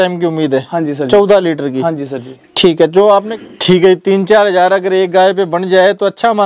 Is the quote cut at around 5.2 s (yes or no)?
no